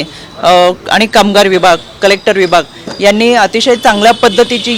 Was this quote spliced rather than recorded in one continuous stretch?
no; 0 cuts

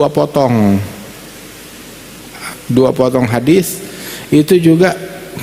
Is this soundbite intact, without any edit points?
yes; 0 cuts

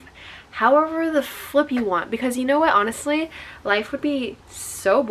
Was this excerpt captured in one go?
yes; 0 cuts

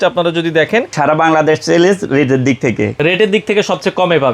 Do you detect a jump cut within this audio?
yes; 2 cuts; at 0.9 s, 2.9 s

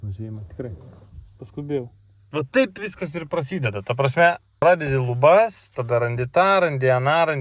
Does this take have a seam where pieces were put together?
yes; 2 cuts; at 2.3 s, 4.6 s

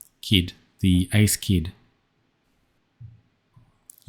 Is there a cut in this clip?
yes; 1 cut; at 2.5 s

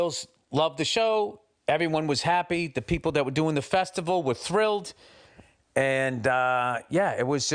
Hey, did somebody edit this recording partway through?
no; 0 cuts

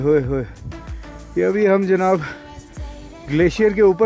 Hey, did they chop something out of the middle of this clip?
no; 0 cuts

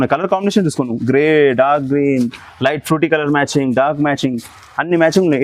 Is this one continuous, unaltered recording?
yes; 0 cuts

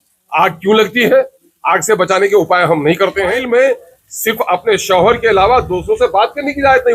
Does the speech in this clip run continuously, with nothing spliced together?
no; 1 cut; at 3.3 s

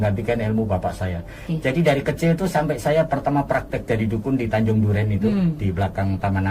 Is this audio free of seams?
no; 1 cut; at 1.4 s

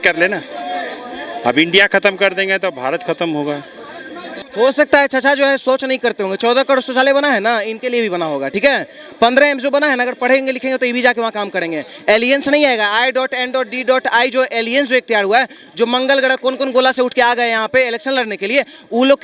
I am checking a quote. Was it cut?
yes; 1 cut; at 4.4 s

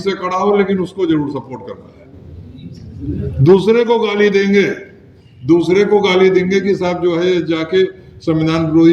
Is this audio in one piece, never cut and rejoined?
yes; 0 cuts

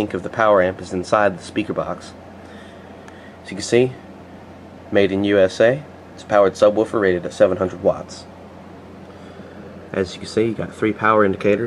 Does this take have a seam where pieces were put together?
yes; 1 cut; at 5.2 s

